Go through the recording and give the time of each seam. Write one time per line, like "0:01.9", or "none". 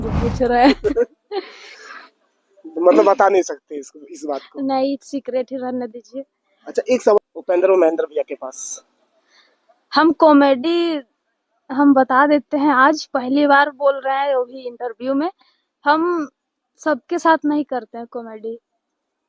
0:07.2